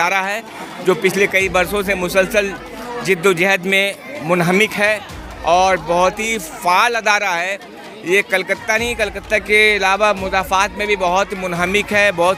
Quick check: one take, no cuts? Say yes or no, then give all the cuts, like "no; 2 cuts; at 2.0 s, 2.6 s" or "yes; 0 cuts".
yes; 0 cuts